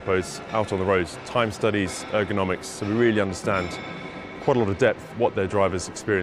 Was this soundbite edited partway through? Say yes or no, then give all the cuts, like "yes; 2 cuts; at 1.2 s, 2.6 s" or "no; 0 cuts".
no; 0 cuts